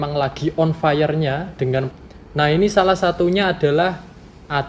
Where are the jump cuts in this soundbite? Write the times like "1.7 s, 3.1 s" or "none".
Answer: 1.9 s